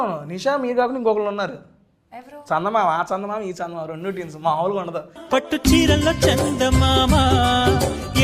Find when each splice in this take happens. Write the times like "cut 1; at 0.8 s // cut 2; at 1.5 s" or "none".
none